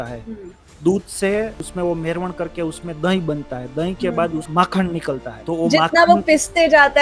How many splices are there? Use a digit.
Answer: 3